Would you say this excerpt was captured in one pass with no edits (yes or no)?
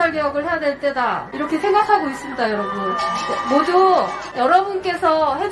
no